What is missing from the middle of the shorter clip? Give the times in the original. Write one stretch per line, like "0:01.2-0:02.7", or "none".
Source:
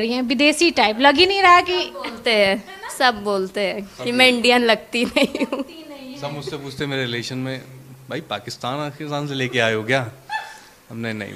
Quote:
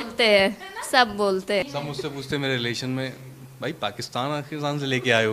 0:03.7-0:06.2